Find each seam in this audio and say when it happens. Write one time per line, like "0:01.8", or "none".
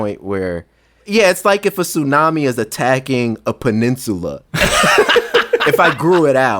0:05.7

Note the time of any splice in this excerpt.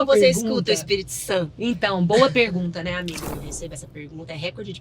0:03.3

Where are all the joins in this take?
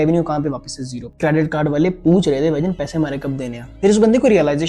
0:01.0
0:03.7

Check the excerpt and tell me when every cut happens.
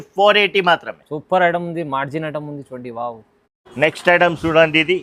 none

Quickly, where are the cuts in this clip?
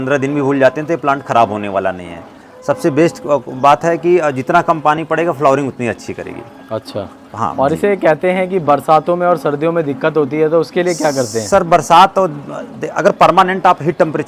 none

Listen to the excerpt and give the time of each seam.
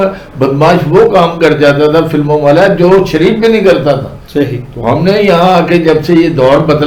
none

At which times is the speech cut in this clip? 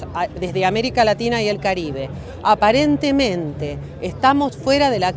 0:03.7

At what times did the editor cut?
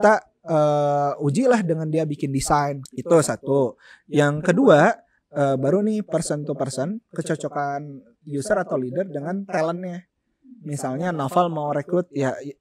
0:02.8
0:08.2

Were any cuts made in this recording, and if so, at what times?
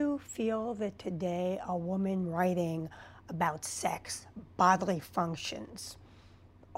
none

